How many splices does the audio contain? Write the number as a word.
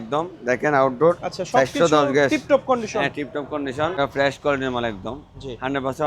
one